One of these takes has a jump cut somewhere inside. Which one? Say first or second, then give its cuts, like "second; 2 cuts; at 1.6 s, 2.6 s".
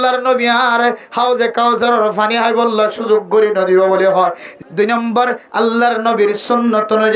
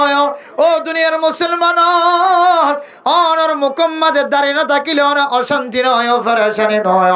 first; 1 cut; at 4.5 s